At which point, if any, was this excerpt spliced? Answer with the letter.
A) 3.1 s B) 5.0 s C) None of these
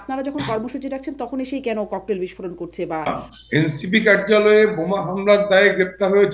A